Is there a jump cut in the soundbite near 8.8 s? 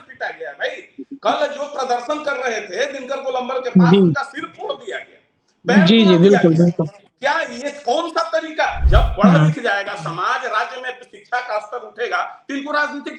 yes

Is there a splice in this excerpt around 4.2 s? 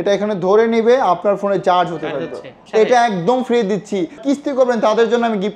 yes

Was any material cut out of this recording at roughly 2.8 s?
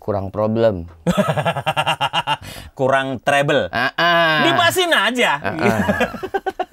no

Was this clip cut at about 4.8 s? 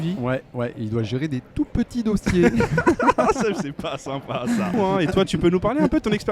yes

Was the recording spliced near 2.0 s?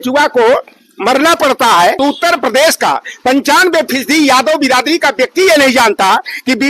yes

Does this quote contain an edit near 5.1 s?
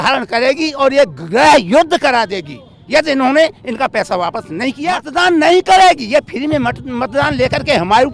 yes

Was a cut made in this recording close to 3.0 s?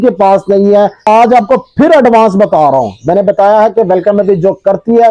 no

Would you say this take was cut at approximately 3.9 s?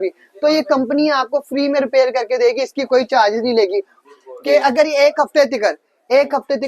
yes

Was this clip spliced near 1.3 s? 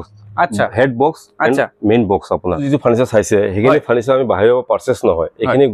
no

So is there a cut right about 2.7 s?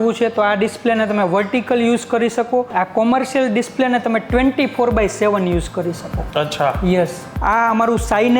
yes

